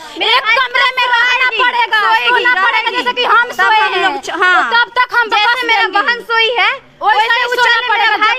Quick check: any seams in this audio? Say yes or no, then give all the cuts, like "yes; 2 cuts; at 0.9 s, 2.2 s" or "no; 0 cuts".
no; 0 cuts